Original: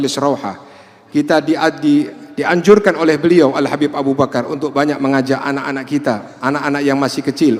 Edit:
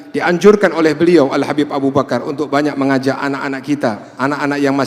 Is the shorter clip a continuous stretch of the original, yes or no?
yes